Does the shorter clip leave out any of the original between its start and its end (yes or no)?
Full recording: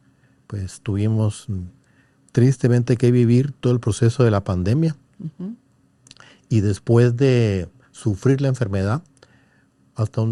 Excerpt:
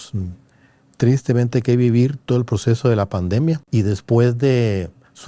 yes